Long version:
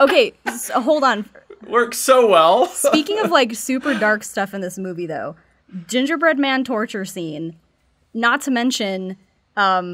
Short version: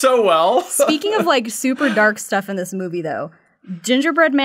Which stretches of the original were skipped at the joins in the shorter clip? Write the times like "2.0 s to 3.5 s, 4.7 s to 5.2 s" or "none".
none